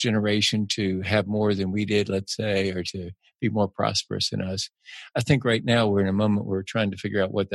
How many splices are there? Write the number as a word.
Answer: zero